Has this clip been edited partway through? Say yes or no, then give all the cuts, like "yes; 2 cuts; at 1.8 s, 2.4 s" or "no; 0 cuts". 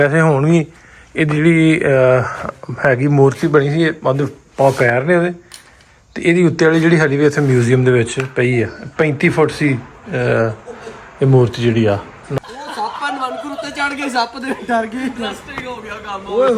yes; 1 cut; at 12.2 s